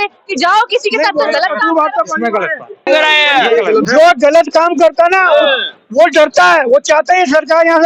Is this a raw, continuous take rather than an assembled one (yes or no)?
no